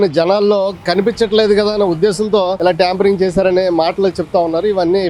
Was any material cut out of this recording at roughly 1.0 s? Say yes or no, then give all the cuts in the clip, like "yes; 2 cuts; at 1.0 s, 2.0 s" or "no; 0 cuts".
no; 1 cut; at 2.6 s